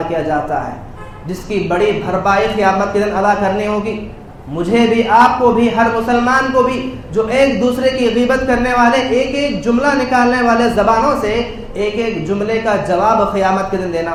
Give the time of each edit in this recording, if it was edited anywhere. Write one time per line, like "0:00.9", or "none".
none